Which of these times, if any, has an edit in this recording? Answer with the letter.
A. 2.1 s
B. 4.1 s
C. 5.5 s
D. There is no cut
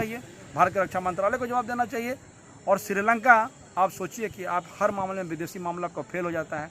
D